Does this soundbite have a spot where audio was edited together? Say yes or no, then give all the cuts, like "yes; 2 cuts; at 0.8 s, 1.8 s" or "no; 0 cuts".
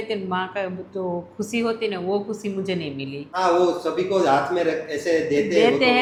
no; 0 cuts